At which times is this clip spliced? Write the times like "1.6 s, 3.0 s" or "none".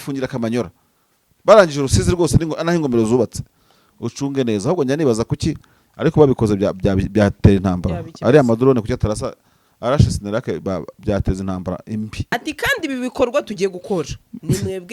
12.2 s